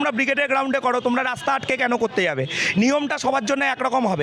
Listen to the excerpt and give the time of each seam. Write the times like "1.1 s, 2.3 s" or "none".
none